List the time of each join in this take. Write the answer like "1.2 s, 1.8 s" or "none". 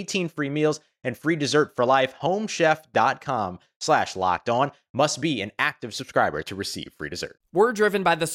7.3 s